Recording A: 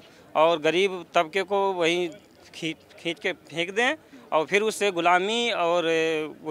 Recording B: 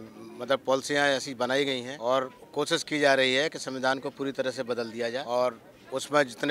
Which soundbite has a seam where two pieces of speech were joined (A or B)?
B